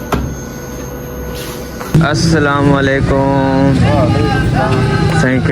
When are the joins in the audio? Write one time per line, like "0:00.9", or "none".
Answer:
0:01.9